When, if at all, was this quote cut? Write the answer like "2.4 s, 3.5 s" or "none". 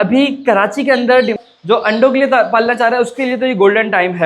1.4 s